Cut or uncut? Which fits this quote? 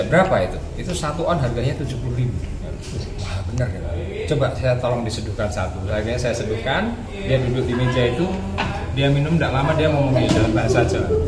uncut